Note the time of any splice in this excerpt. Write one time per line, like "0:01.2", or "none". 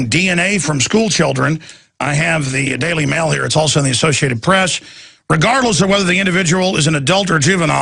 0:05.5